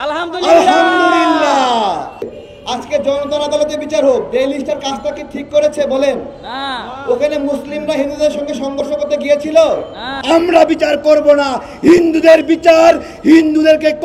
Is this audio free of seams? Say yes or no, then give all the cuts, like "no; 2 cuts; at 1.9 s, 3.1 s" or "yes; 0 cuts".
no; 2 cuts; at 2.3 s, 10.1 s